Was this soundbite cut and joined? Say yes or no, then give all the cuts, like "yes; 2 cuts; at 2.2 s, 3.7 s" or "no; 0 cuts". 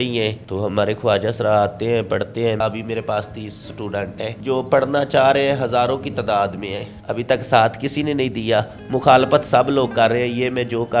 yes; 3 cuts; at 2.6 s, 4.3 s, 6.9 s